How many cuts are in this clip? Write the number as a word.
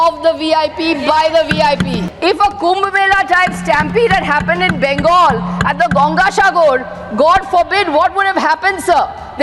one